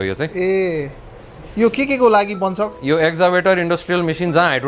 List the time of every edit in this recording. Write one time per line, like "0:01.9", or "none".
none